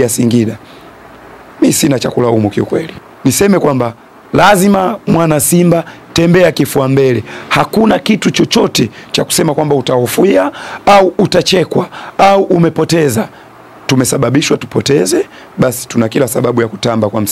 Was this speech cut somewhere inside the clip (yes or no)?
yes